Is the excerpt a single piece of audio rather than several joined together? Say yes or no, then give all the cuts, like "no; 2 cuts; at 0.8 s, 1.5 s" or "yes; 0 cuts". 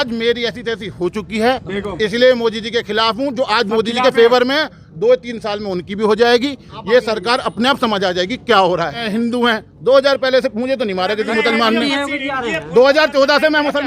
no; 1 cut; at 9.0 s